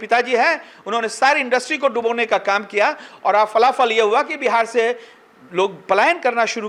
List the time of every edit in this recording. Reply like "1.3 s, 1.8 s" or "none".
none